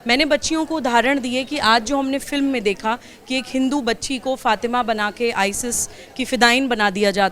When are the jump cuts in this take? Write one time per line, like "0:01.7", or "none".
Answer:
none